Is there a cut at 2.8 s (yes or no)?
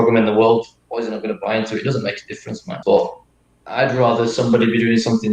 yes